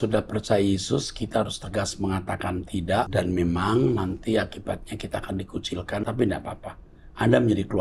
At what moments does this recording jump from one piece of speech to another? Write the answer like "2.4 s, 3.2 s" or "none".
3.1 s, 6.0 s